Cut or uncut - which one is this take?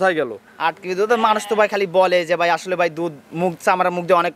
uncut